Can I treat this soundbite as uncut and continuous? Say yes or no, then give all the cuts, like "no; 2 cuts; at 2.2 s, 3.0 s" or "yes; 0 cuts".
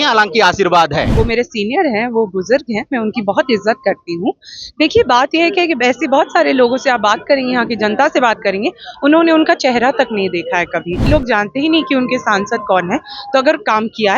no; 2 cuts; at 1.1 s, 11.0 s